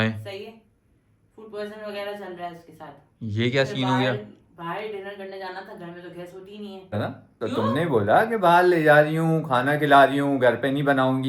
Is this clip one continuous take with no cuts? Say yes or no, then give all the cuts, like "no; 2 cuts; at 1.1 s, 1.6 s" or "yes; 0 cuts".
no; 1 cut; at 7.0 s